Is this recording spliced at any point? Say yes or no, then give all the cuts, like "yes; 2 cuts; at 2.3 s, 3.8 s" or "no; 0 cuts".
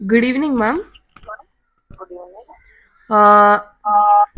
no; 0 cuts